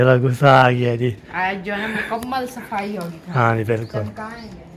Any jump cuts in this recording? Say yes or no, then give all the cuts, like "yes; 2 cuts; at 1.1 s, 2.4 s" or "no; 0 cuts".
no; 0 cuts